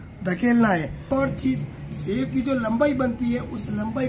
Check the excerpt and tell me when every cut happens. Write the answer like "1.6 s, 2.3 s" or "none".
1.1 s